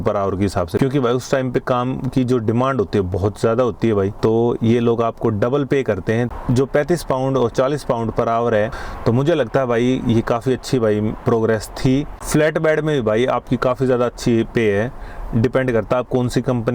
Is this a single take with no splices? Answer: no; 5 cuts; at 0.8 s, 4.1 s, 6.3 s, 8.7 s, 12.1 s

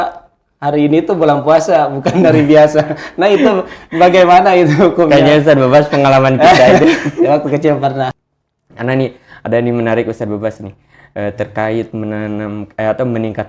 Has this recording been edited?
yes; 1 cut; at 8.2 s

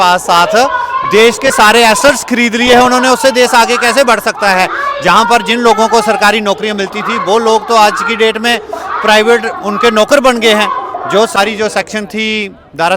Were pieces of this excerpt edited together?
yes; 1 cut; at 11.4 s

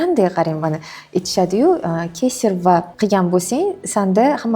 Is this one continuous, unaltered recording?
no; 1 cut; at 2.9 s

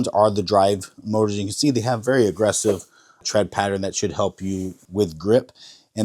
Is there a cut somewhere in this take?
yes; 1 cut; at 4.8 s

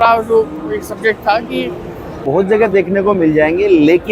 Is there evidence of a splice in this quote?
yes; 1 cut; at 2.2 s

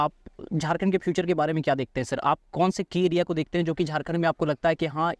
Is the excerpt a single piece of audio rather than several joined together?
yes; 0 cuts

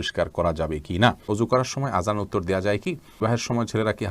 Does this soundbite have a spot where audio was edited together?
yes; 2 cuts; at 1.2 s, 3.2 s

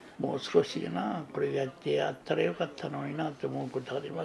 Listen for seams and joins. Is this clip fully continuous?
yes; 0 cuts

